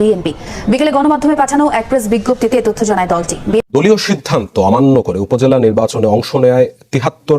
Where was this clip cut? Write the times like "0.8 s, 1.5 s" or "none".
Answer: 3.6 s